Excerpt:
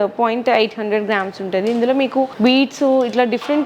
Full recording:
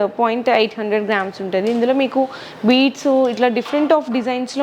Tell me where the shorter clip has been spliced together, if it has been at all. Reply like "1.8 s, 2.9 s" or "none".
2.3 s